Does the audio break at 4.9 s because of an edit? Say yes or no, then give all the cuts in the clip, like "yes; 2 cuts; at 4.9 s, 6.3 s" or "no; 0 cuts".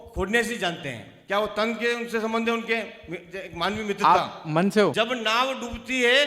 yes; 1 cut; at 4.9 s